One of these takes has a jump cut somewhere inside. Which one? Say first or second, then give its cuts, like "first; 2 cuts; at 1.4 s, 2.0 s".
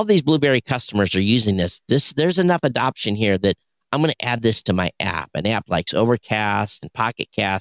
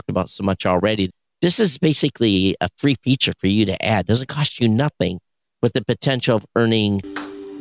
second; 1 cut; at 1.1 s